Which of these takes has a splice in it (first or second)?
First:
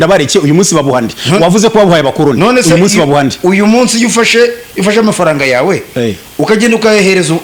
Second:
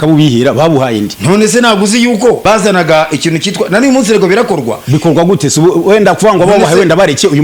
second